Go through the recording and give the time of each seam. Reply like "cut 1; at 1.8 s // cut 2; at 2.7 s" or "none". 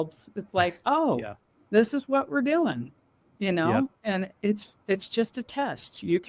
none

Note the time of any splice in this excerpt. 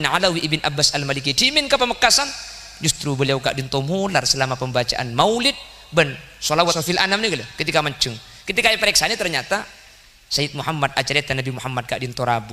cut 1; at 6.8 s

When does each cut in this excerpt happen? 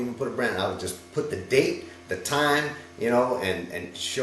none

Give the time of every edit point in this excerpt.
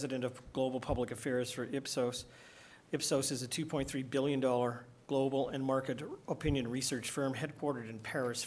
cut 1; at 6.5 s

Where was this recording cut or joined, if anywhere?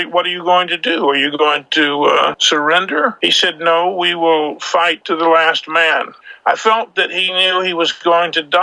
cut 1; at 2.4 s // cut 2; at 3.2 s // cut 3; at 5.0 s // cut 4; at 6.2 s

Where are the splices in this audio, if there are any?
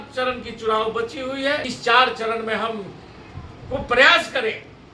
cut 1; at 1.7 s

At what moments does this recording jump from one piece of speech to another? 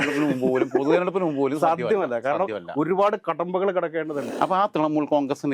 cut 1; at 4.3 s

